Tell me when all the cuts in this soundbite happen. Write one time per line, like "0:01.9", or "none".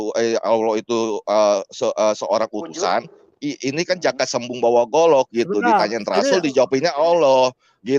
none